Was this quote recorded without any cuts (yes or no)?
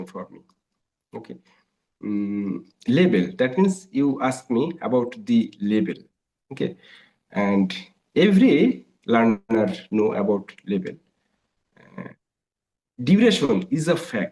yes